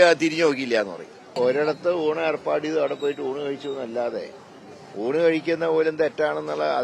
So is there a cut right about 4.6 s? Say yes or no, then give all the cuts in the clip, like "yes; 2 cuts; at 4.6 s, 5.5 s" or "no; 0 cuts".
no; 1 cut; at 1.3 s